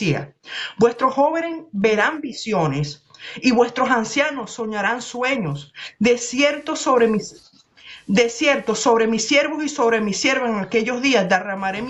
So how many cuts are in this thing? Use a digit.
0